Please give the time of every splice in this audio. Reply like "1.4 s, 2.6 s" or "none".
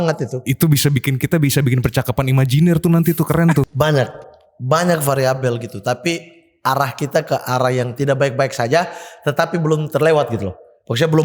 3.7 s

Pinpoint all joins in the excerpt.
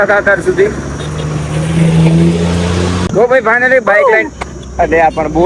3.1 s

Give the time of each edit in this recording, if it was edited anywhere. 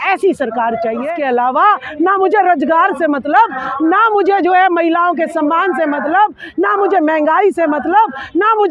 1.0 s

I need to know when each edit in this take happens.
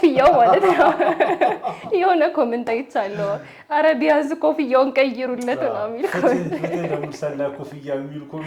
none

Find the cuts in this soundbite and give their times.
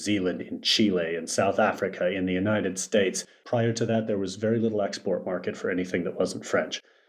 3.3 s

